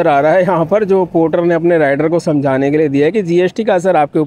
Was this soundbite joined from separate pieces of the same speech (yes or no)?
no